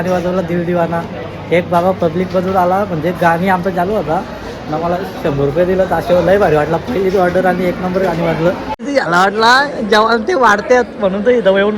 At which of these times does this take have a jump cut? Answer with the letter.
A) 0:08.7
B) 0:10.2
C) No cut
A